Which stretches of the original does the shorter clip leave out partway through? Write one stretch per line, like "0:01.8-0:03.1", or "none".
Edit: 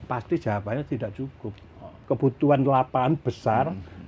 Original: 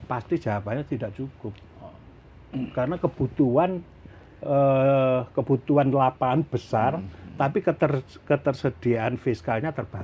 0:02.0-0:05.3

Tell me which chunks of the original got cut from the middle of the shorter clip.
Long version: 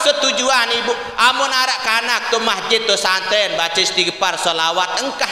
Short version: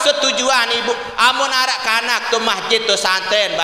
none

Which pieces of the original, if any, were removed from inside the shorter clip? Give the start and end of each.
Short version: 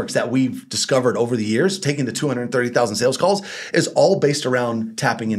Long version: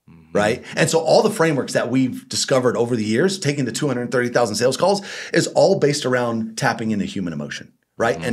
none

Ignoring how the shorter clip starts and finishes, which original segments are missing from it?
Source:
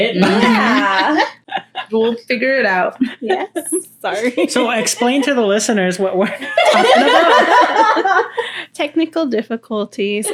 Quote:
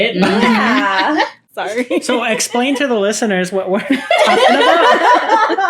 0:01.5-0:03.9

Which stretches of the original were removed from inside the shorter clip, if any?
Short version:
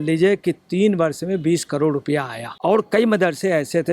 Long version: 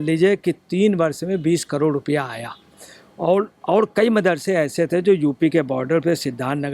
0:02.5-0:03.6

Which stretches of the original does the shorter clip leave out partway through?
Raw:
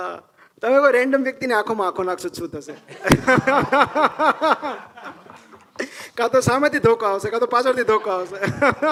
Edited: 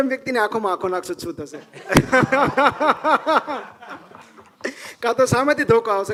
none

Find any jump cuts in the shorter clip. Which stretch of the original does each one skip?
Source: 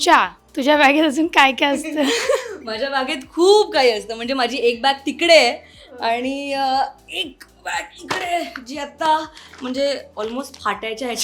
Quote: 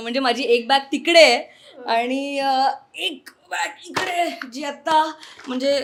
none

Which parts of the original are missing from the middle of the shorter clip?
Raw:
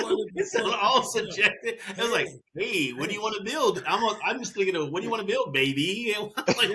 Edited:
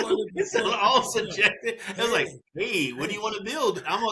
none

